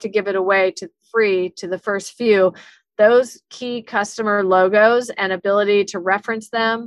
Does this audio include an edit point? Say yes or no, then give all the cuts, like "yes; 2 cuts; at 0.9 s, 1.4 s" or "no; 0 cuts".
no; 0 cuts